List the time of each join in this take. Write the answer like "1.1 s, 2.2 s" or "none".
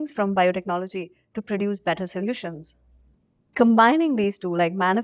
3.0 s